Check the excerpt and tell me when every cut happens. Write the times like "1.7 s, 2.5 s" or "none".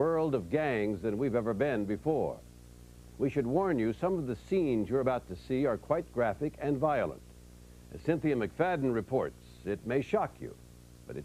5.9 s